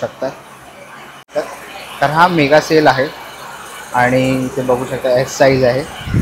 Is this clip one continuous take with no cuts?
no; 1 cut; at 1.3 s

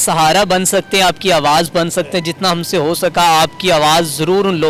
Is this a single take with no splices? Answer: yes; 0 cuts

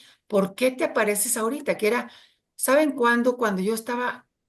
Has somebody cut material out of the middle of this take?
no; 0 cuts

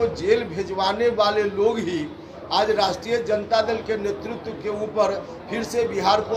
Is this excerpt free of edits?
yes; 0 cuts

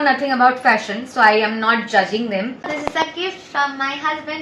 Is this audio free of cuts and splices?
no; 1 cut; at 2.9 s

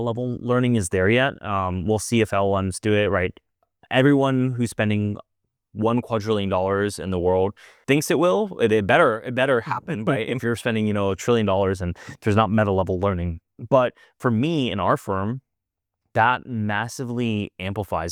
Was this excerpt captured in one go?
yes; 0 cuts

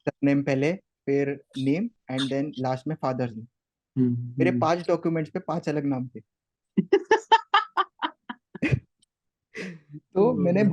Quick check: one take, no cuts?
yes; 0 cuts

